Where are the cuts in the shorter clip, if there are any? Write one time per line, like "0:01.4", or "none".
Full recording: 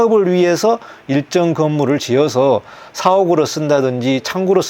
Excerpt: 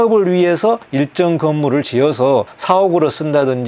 0:00.9
0:02.5